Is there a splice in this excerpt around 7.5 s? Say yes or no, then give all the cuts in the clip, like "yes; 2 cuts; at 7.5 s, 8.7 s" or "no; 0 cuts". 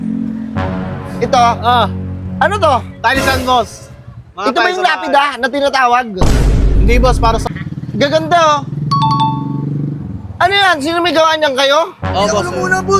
yes; 1 cut; at 7.5 s